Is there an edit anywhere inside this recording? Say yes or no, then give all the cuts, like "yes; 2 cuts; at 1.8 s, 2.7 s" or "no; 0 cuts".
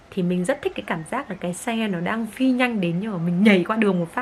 no; 0 cuts